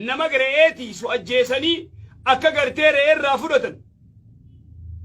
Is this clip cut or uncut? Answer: cut